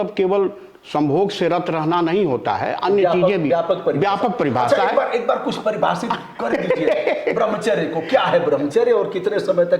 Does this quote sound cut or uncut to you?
uncut